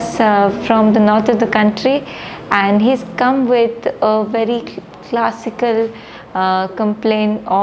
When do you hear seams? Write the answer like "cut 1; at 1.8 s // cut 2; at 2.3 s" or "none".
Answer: none